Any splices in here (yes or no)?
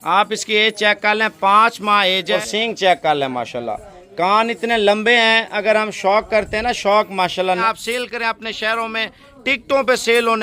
yes